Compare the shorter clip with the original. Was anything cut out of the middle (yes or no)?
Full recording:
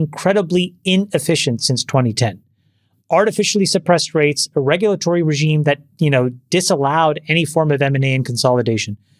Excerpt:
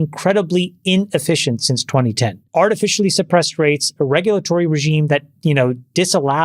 yes